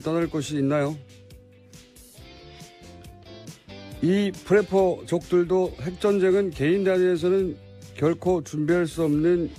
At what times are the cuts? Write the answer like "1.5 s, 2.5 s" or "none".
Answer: 4.8 s